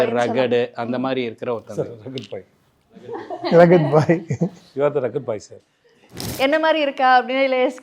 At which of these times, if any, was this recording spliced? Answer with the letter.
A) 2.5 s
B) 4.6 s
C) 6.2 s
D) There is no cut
C